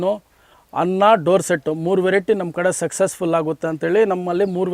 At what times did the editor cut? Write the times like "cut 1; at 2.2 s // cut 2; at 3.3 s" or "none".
none